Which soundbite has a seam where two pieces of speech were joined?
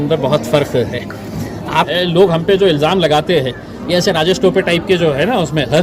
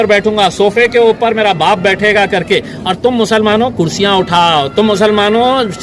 first; 1 cut; at 1.9 s

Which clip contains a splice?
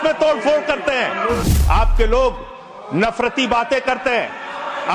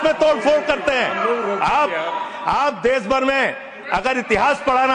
first; 1 cut; at 1.4 s

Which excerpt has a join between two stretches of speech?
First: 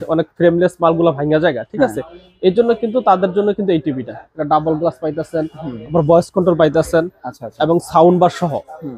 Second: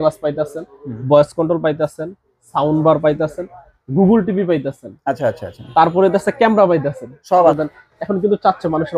second; 1 cut; at 7.6 s

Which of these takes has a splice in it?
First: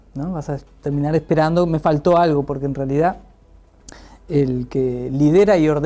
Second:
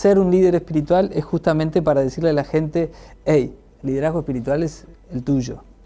second; 1 cut; at 2.8 s

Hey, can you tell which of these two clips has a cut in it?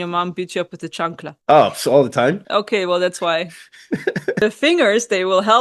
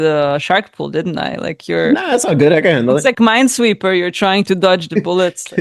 first; 3 cuts; at 1.3 s, 2.4 s, 4.4 s

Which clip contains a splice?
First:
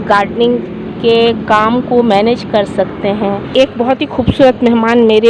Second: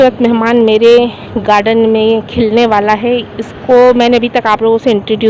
first; 1 cut; at 3.5 s

